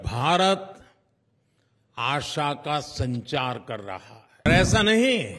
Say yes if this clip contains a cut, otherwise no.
yes